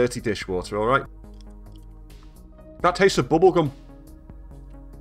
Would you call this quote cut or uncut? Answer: cut